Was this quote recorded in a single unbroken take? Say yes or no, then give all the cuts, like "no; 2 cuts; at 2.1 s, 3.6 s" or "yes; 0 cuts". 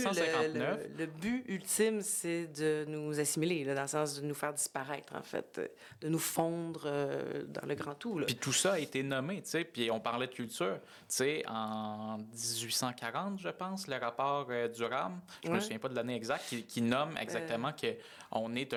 yes; 0 cuts